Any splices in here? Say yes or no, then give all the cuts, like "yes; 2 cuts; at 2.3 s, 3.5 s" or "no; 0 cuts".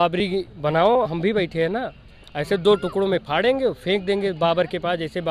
no; 0 cuts